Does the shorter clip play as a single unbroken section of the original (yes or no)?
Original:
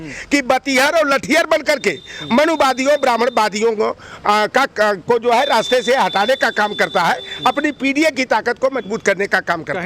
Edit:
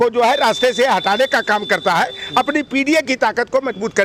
yes